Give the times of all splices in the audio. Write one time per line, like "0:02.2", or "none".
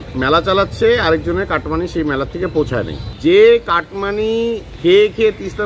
0:03.0